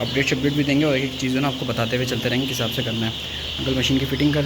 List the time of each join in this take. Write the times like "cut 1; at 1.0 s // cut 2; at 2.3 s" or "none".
none